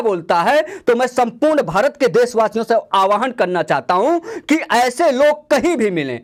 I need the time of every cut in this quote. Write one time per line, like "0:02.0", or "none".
none